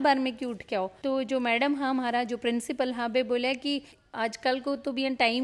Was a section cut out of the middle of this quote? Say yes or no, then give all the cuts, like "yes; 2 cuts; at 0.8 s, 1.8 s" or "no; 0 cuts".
yes; 1 cut; at 3.9 s